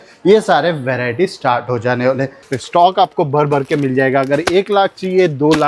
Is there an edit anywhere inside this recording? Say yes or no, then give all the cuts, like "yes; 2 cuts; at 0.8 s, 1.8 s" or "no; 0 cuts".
yes; 1 cut; at 2.4 s